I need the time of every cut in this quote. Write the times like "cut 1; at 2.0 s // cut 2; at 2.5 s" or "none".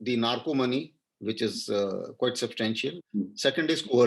cut 1; at 2.9 s